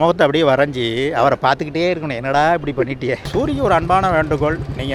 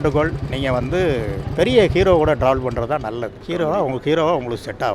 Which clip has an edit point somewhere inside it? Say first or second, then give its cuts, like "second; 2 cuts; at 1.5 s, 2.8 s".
first; 1 cut; at 3.2 s